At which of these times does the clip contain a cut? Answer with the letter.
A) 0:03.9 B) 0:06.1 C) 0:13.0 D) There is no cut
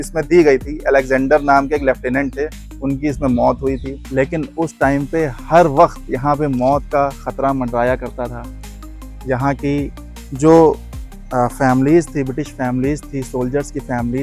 A